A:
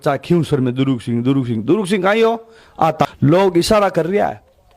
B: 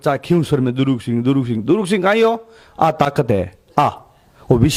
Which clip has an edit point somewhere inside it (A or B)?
A